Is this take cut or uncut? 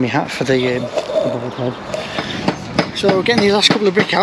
cut